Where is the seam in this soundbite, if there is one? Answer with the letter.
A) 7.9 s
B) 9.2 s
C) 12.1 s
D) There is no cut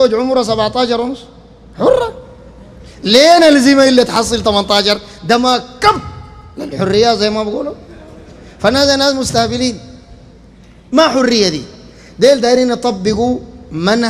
D